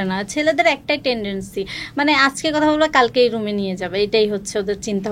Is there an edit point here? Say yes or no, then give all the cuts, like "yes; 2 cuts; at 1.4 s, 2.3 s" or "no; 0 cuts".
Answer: no; 0 cuts